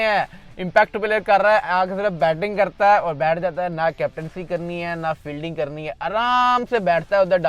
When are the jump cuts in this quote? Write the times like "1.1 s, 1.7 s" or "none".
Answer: none